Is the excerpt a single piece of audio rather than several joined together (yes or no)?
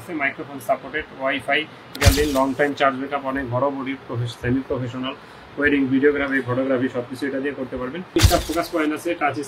no